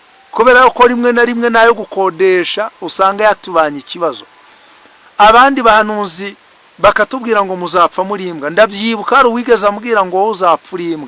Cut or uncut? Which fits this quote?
uncut